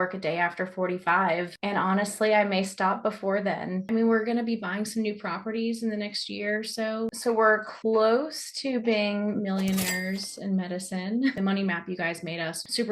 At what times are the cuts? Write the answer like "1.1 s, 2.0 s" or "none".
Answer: 3.8 s, 7.5 s, 11.4 s